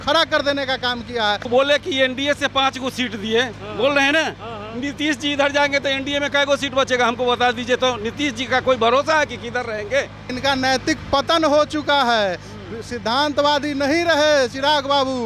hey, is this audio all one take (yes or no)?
no